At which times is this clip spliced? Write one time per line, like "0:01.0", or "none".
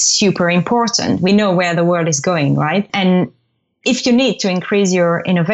0:01.3
0:02.9